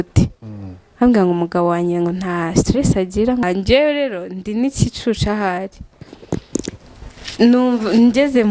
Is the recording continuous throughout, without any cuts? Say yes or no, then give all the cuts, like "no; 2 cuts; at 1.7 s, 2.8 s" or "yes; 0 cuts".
no; 1 cut; at 3.4 s